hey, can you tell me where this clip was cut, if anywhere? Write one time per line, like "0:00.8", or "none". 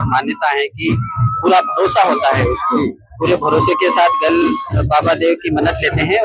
none